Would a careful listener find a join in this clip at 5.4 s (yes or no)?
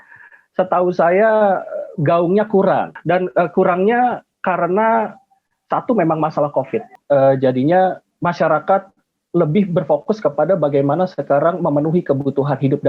no